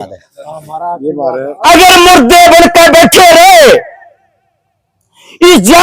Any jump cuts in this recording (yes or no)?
yes